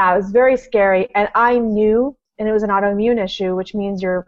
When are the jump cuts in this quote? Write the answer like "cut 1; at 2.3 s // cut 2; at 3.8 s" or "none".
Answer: cut 1; at 2.3 s